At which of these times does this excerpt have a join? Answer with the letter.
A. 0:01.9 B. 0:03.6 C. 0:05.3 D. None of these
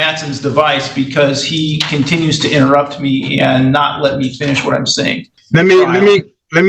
C